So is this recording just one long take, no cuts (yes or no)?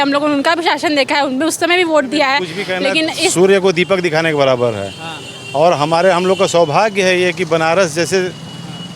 no